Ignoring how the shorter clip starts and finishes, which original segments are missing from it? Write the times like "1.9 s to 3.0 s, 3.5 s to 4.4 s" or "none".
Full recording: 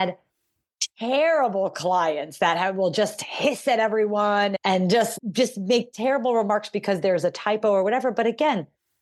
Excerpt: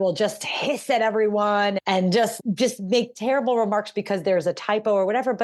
none